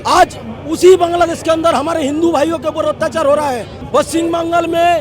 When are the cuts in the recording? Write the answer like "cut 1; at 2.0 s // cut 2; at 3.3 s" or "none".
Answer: cut 1; at 3.7 s